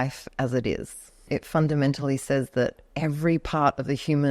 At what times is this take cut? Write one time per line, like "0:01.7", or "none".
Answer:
0:01.2
0:02.8